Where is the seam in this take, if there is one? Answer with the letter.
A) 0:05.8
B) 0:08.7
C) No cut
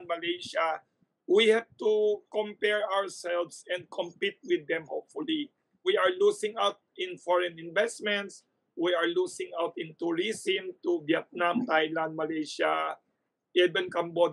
A